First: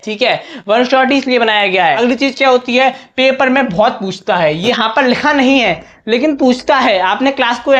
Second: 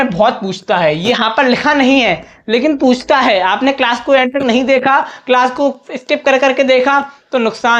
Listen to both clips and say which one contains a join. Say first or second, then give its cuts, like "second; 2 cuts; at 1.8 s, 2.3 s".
first; 1 cut; at 2.0 s